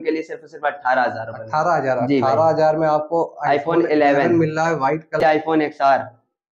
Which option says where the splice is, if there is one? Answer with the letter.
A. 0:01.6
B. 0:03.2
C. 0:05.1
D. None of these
C